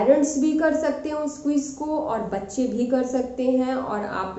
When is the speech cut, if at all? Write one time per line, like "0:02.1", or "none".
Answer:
none